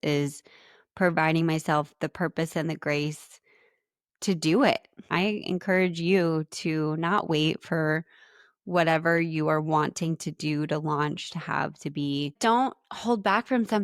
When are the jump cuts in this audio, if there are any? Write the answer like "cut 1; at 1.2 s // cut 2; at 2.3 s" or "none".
cut 1; at 5.1 s // cut 2; at 12.3 s